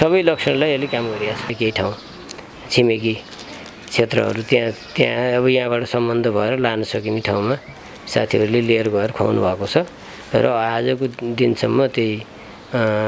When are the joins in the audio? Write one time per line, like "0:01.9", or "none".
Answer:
0:01.5

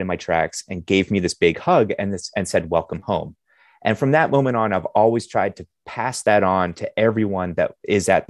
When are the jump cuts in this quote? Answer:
none

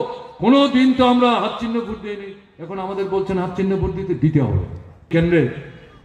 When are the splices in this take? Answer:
0:05.1

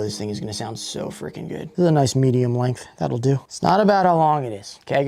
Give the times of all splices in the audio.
0:01.7
0:03.5

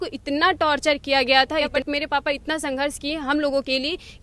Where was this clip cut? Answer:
0:01.7

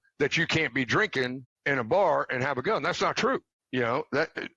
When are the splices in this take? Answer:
0:01.5
0:03.6

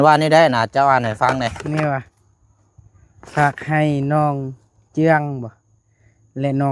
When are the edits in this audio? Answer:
none

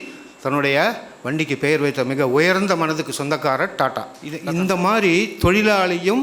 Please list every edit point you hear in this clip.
0:04.4

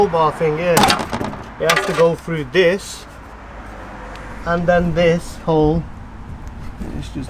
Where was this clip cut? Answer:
none

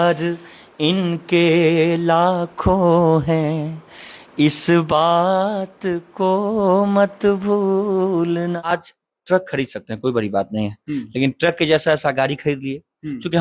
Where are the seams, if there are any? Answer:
0:08.7

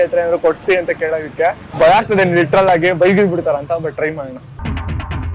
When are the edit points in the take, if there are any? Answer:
0:01.7

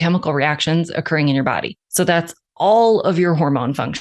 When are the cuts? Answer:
0:01.8

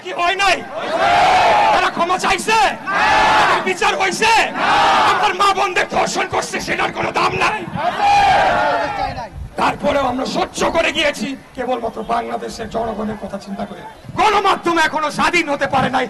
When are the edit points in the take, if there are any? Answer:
0:13.9

